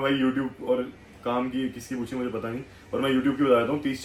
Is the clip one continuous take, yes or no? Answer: yes